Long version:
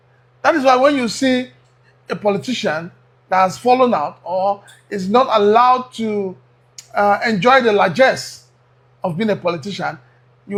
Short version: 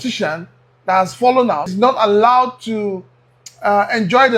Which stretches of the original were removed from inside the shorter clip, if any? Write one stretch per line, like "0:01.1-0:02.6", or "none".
0:04.1-0:05.0